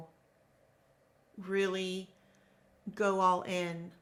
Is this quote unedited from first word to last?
yes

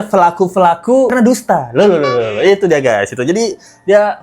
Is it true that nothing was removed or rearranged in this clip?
yes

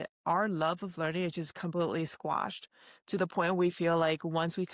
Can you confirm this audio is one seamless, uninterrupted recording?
yes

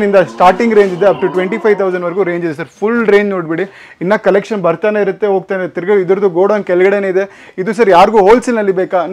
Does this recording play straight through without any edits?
yes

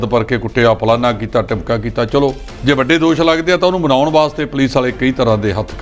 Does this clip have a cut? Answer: yes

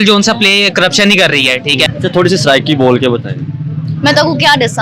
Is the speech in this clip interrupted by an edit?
yes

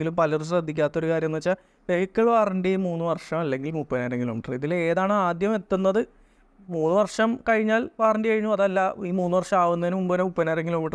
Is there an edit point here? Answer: no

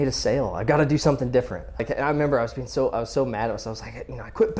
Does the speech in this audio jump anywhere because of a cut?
yes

